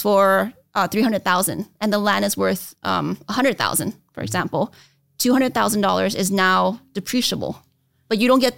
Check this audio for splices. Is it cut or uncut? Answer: uncut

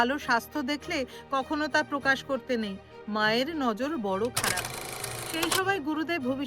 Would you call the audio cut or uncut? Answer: cut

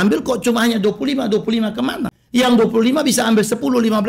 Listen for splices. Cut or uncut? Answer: cut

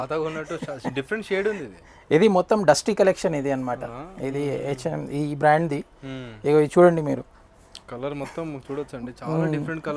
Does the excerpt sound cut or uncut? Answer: uncut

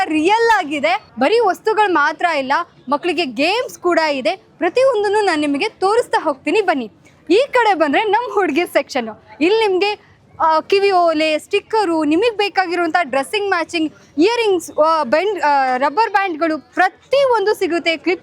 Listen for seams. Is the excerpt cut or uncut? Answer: cut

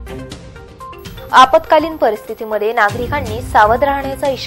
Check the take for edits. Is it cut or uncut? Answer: cut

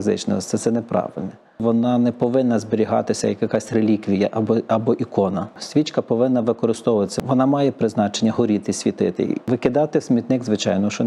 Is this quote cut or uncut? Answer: cut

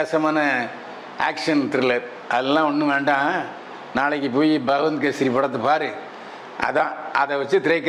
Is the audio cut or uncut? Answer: uncut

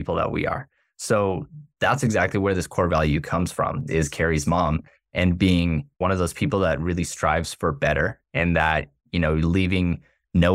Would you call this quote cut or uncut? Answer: cut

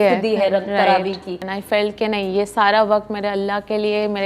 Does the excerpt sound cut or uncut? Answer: cut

